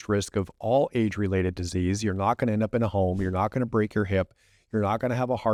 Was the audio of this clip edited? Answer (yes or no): no